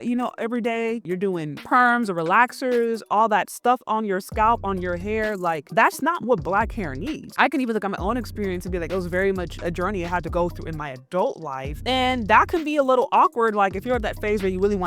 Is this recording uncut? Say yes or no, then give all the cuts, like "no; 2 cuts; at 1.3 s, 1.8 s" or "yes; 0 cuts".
no; 1 cut; at 7.3 s